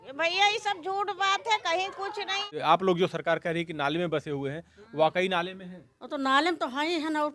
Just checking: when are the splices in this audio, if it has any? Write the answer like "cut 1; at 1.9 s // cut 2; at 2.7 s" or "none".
cut 1; at 2.5 s